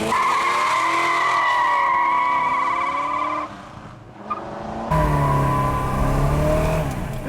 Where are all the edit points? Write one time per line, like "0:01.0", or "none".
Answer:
0:04.9